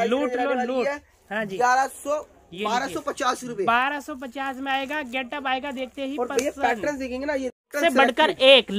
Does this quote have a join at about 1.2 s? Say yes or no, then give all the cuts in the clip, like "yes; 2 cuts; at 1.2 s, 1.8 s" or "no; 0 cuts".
no; 0 cuts